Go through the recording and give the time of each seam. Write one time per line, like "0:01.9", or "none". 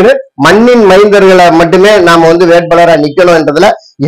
none